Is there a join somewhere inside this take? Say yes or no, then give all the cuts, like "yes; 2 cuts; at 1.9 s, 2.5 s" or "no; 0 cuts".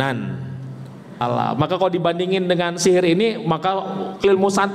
yes; 1 cut; at 1.2 s